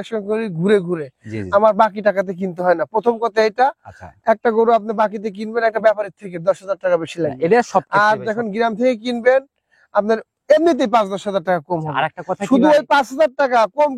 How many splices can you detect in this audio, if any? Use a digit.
0